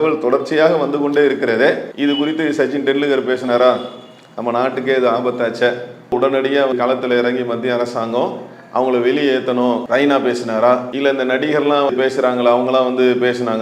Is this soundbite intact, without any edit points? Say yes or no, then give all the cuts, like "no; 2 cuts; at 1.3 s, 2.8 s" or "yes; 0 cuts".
no; 5 cuts; at 1.9 s, 6.7 s, 9.8 s, 10.9 s, 11.9 s